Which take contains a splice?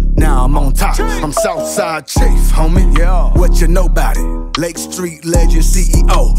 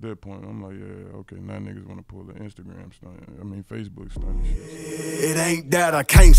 second; 1 cut; at 4.5 s

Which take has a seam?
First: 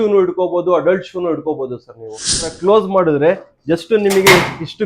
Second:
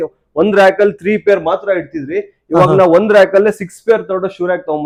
first; 1 cut; at 2.4 s

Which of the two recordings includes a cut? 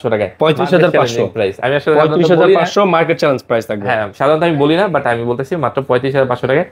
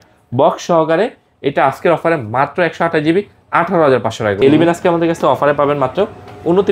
second; 1 cut; at 4.4 s

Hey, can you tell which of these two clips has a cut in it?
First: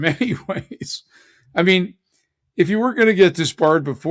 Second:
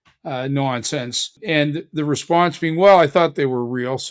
second; 1 cut; at 1.4 s

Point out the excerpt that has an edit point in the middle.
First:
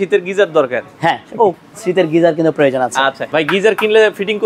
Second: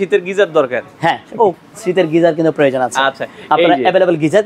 first; 1 cut; at 3.2 s

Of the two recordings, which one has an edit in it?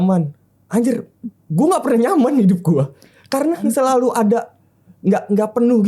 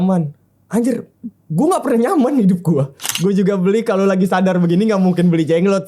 second; 1 cut; at 3.0 s

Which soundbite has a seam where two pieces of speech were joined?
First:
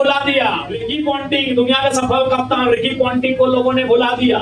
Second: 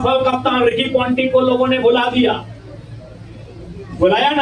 first; 1 cut; at 1.0 s

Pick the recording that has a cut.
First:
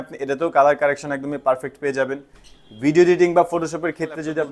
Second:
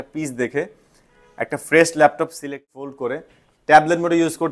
second; 1 cut; at 2.5 s

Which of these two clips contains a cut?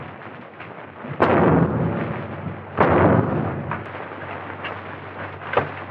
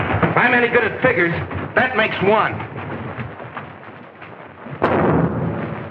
first; 1 cut; at 3.9 s

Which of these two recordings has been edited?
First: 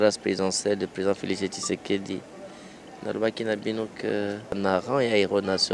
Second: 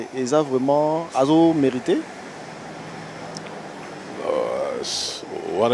first; 1 cut; at 4.6 s

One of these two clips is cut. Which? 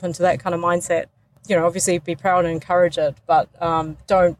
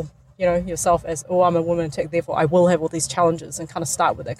first; 1 cut; at 1.3 s

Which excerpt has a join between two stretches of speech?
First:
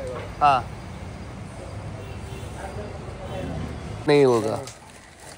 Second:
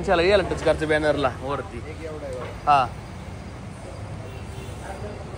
first; 1 cut; at 4.1 s

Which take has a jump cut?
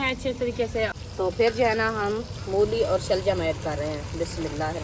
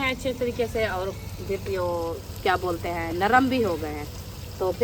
first; 1 cut; at 1.0 s

